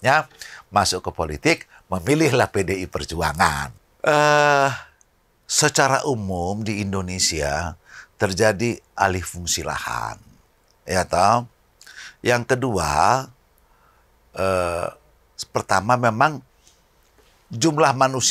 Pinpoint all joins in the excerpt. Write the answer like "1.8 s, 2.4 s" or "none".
3.8 s